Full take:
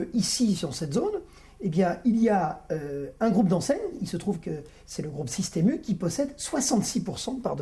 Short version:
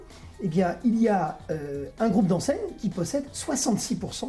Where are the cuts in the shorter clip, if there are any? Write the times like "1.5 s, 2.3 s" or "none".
2.8 s